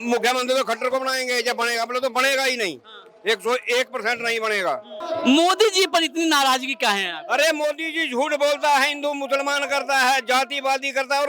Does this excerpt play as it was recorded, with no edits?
no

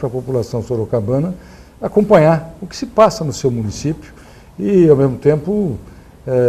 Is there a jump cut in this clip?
yes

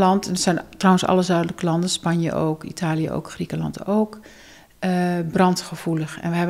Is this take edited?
no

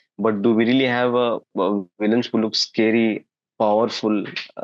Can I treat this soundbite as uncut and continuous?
yes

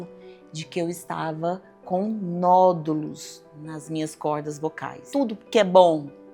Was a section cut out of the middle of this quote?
yes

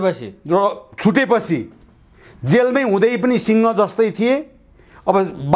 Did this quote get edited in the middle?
no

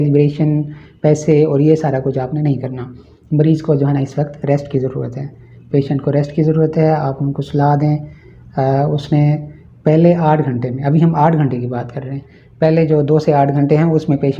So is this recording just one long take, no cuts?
yes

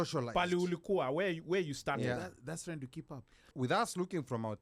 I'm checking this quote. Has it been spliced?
yes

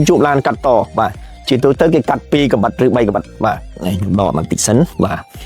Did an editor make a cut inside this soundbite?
no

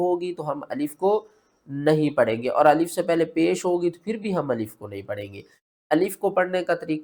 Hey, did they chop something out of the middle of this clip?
no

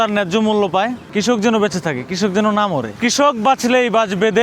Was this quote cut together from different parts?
yes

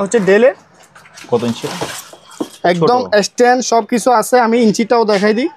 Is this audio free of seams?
yes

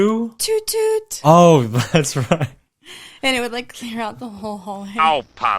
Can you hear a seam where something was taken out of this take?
no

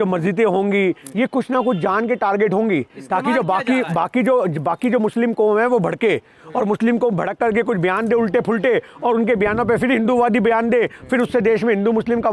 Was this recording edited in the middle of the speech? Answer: no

